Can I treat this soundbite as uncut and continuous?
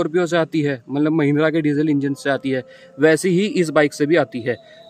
yes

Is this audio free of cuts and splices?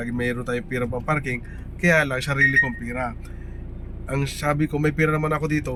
yes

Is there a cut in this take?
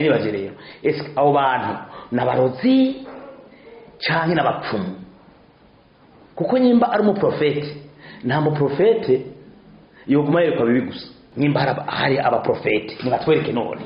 yes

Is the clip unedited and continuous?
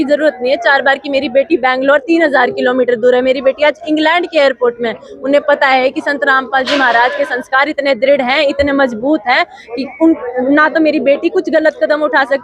yes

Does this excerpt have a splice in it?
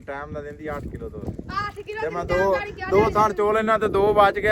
no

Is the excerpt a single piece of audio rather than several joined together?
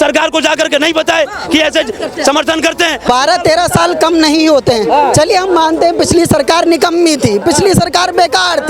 no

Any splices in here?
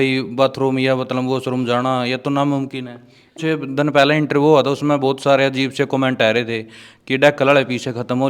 yes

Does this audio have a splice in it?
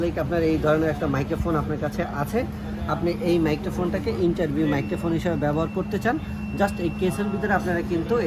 no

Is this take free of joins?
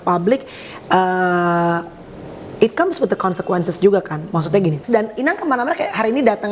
no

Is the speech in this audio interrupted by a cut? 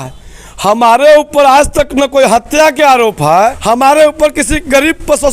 yes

